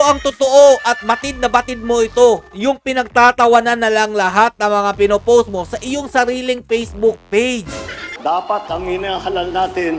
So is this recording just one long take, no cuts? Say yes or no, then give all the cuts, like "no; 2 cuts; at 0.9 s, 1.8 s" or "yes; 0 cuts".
no; 1 cut; at 8.1 s